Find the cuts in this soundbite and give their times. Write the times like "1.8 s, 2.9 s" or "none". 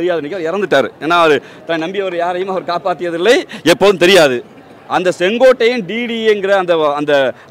none